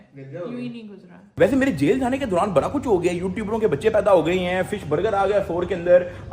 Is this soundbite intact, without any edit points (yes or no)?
no